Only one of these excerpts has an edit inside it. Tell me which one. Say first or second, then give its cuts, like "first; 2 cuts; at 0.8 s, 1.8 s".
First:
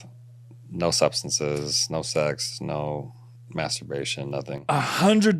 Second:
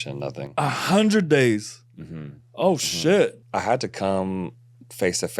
second; 1 cut; at 3.4 s